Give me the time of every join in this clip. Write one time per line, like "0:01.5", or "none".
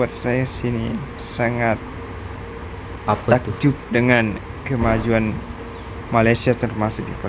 none